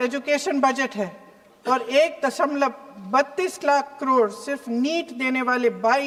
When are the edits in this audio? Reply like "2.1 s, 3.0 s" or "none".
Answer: none